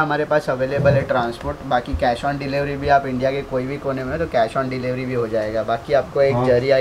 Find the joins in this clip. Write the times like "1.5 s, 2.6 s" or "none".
none